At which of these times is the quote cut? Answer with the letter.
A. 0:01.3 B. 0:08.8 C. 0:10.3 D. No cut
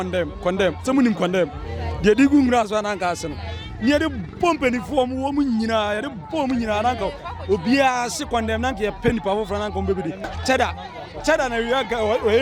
C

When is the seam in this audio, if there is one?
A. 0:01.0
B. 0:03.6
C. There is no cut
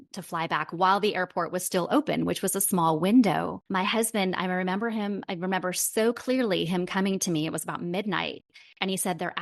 B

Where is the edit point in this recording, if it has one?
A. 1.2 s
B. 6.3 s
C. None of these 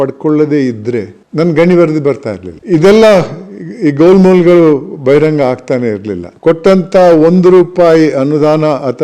B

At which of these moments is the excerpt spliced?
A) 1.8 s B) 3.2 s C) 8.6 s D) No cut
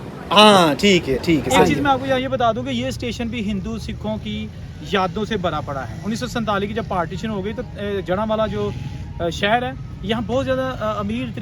A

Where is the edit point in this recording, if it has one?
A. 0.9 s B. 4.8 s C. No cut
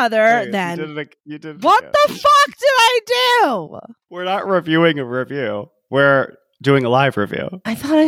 A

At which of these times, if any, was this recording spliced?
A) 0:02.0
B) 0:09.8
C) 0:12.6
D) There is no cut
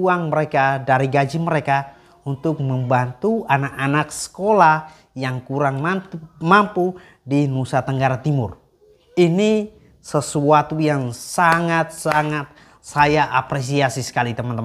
D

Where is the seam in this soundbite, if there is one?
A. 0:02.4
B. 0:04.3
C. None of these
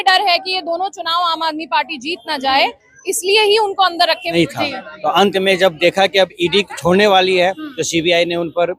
B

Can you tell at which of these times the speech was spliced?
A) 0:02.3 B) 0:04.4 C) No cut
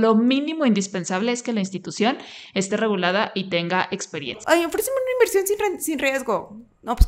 B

